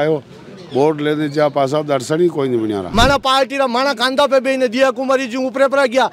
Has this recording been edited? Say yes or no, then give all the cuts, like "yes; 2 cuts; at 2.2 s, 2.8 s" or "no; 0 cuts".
yes; 1 cut; at 2.8 s